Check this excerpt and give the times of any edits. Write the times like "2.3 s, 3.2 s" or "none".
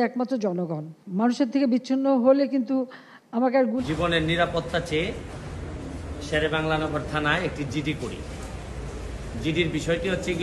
3.8 s